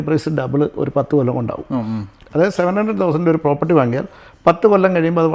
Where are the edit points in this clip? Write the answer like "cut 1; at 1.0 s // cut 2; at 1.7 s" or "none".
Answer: none